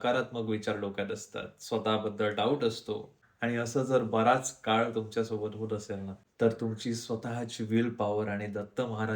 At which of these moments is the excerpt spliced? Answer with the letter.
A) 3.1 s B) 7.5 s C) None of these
A